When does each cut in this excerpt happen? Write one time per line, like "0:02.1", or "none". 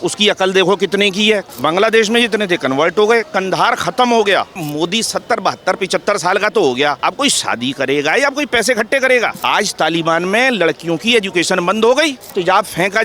0:01.5
0:04.6
0:07.0
0:09.4
0:12.3